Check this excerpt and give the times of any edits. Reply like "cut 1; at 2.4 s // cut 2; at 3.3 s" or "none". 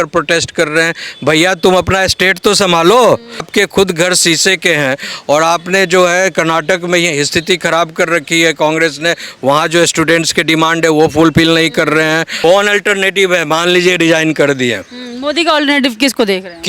cut 1; at 3.5 s // cut 2; at 12.4 s